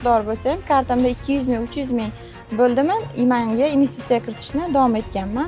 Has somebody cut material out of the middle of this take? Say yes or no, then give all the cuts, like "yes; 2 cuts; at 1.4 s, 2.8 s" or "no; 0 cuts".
no; 0 cuts